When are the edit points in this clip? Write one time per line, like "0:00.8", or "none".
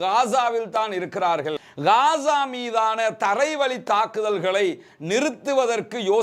0:01.6